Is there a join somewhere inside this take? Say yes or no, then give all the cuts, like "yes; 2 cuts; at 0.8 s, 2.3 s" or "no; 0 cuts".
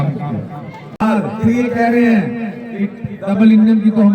yes; 1 cut; at 1.0 s